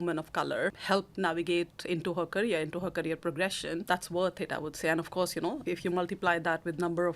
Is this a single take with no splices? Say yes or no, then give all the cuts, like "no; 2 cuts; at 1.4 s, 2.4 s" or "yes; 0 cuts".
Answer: no; 3 cuts; at 0.8 s, 3.8 s, 5.6 s